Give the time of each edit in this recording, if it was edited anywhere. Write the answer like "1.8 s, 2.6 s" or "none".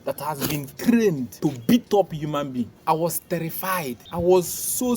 1.3 s, 2.8 s, 4.0 s